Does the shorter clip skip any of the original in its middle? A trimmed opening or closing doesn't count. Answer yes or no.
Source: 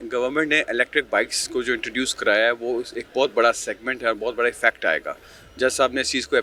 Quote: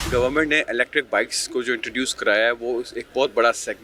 no